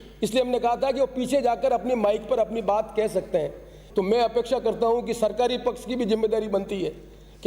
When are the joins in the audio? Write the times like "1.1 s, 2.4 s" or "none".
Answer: 3.8 s